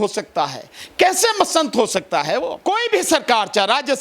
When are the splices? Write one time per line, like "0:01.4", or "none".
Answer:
0:02.6